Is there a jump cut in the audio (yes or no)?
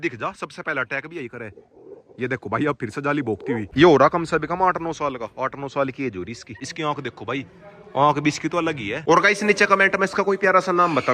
yes